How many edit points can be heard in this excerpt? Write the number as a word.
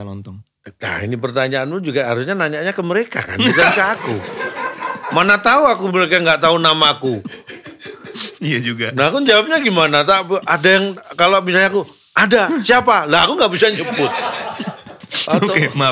zero